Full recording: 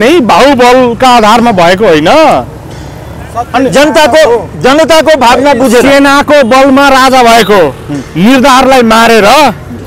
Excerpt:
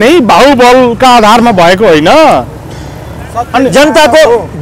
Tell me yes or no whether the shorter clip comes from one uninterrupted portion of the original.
yes